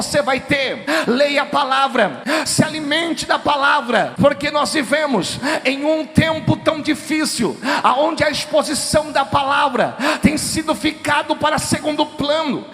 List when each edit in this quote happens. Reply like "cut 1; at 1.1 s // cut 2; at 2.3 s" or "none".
cut 1; at 0.8 s // cut 2; at 2.2 s // cut 3; at 4.2 s